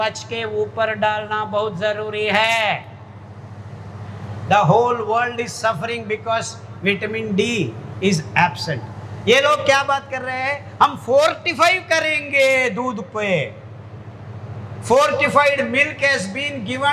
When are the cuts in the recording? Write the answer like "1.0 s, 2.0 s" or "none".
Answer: none